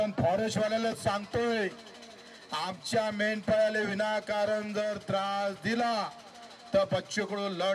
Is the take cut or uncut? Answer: uncut